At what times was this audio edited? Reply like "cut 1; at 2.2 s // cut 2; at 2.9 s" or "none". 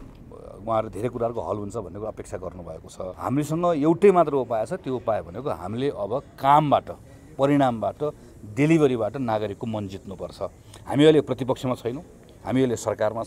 cut 1; at 3.1 s